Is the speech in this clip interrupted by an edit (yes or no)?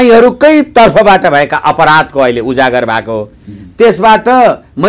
no